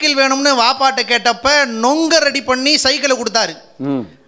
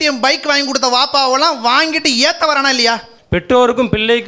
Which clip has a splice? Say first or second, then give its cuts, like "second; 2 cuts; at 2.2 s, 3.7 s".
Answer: second; 1 cut; at 3.1 s